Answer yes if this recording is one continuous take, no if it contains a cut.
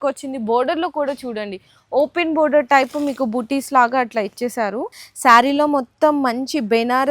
no